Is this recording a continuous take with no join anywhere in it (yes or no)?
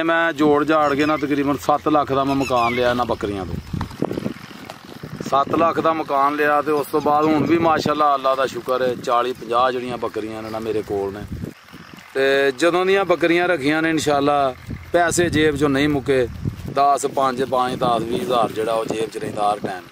no